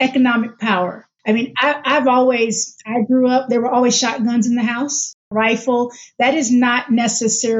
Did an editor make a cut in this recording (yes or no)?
yes